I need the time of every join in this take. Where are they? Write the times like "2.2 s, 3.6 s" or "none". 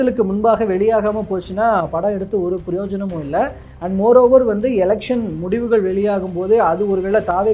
none